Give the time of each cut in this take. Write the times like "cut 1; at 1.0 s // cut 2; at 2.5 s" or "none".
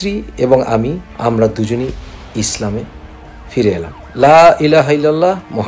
cut 1; at 1.1 s // cut 2; at 4.0 s